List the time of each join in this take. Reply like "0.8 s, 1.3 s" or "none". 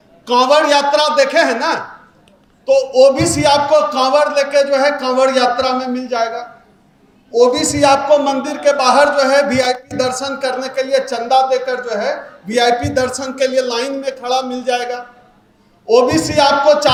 none